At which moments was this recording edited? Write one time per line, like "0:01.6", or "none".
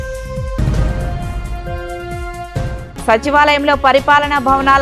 none